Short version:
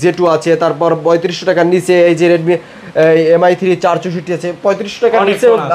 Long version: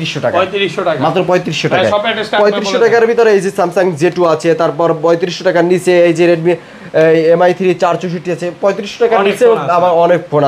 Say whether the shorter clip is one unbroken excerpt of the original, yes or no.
yes